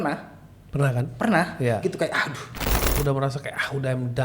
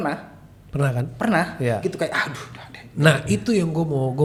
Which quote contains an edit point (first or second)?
first